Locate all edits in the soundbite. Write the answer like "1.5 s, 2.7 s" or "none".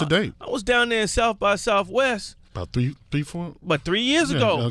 2.9 s